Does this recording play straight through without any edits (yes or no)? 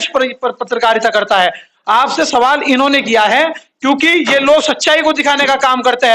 yes